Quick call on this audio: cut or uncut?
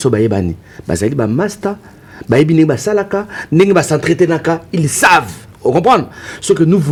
uncut